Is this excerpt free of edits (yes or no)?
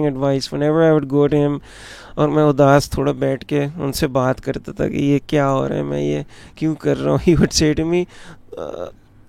yes